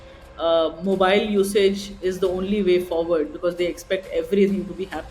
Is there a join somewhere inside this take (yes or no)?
no